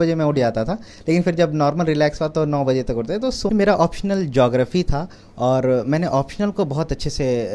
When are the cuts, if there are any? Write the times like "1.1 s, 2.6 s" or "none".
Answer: 3.5 s